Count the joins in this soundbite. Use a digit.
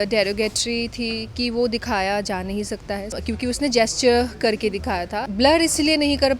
2